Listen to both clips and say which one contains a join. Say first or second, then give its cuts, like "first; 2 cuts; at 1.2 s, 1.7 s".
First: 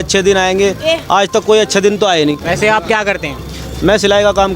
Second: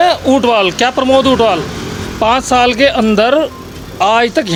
first; 1 cut; at 2.4 s